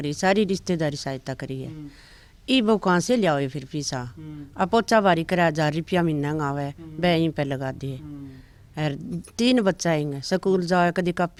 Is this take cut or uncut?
uncut